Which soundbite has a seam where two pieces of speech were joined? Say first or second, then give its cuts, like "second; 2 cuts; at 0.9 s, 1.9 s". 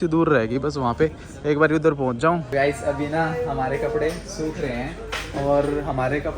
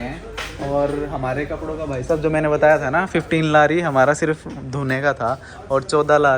first; 1 cut; at 2.4 s